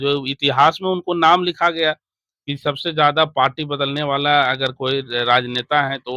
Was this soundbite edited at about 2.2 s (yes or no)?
no